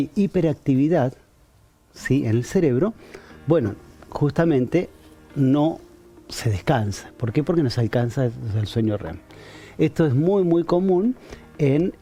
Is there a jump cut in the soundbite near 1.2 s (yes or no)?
no